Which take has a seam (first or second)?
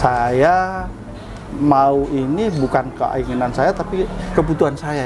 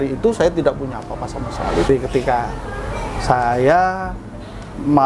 second